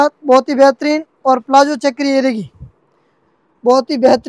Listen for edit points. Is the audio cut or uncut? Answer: uncut